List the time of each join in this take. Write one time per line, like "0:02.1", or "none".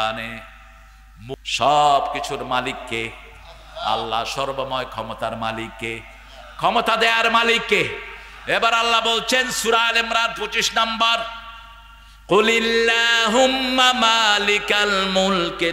0:01.3